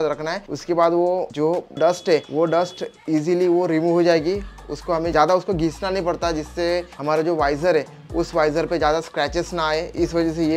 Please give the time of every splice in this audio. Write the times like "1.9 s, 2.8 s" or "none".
none